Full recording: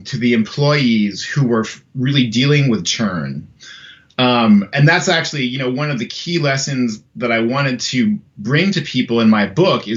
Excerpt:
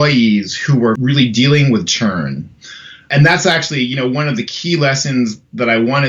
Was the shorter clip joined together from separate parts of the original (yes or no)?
yes